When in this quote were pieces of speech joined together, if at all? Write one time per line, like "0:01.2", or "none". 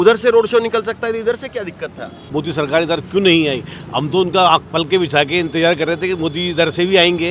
0:02.2